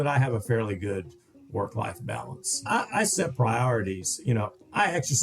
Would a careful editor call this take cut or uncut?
cut